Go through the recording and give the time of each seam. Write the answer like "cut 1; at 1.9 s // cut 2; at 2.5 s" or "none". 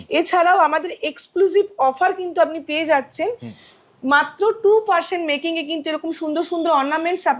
none